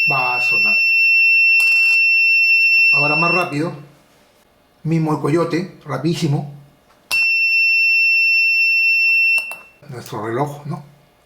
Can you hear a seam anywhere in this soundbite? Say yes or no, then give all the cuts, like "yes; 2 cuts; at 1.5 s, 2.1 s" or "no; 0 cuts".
yes; 1 cut; at 9.9 s